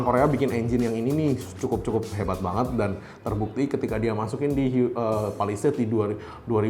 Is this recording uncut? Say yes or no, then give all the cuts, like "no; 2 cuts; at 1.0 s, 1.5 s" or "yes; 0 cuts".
yes; 0 cuts